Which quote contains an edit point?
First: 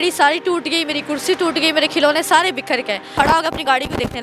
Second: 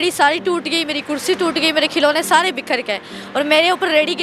first; 1 cut; at 3.1 s

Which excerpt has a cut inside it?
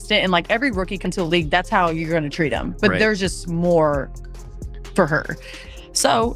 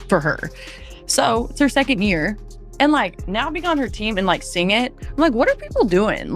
first; 1 cut; at 1.0 s

